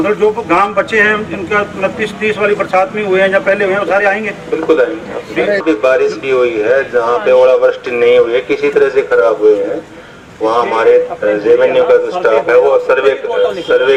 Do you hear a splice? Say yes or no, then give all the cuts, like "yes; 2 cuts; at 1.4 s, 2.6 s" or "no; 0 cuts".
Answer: no; 0 cuts